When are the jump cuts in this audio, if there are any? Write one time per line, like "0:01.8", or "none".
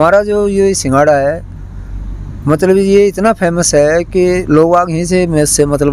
none